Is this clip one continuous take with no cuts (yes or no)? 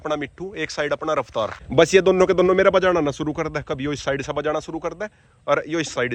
yes